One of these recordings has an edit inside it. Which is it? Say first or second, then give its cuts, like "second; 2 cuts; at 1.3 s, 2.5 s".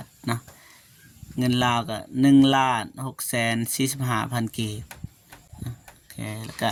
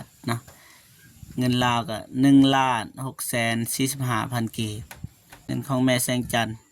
second; 1 cut; at 5.5 s